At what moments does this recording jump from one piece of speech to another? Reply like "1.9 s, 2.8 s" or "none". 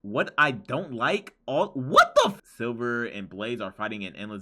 2.4 s

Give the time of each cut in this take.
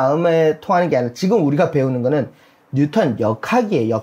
none

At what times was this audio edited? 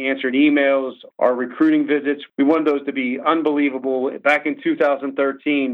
1.0 s, 2.2 s

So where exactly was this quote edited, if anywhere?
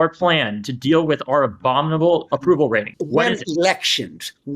2.9 s

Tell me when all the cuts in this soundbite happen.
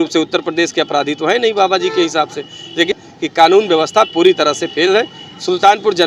none

